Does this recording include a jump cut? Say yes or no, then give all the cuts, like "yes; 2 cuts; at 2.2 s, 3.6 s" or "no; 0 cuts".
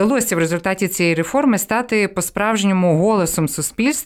no; 0 cuts